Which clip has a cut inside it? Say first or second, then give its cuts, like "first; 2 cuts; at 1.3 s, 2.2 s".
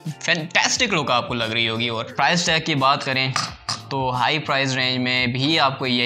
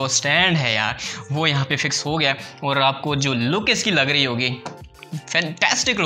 first; 1 cut; at 2.1 s